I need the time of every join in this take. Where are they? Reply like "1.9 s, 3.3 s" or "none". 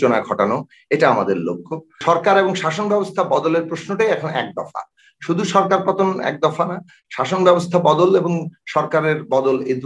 2.0 s